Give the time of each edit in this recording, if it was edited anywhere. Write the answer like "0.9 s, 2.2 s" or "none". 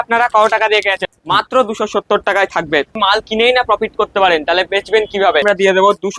1.1 s, 3.0 s, 5.4 s